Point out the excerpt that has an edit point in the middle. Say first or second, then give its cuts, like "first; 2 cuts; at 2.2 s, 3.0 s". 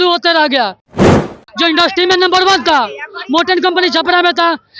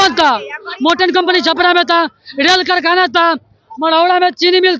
first; 1 cut; at 1.3 s